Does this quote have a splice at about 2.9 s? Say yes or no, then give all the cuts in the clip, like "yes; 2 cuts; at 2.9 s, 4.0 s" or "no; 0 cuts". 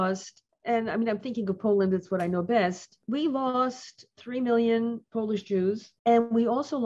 yes; 1 cut; at 2.9 s